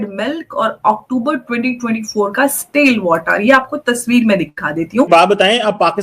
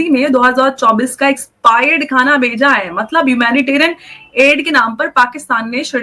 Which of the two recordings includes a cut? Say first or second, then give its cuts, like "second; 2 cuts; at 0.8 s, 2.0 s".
first; 1 cut; at 5.1 s